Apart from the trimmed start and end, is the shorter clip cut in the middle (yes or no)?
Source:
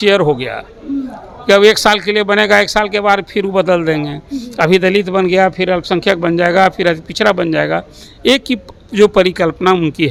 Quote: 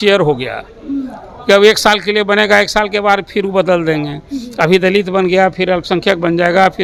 no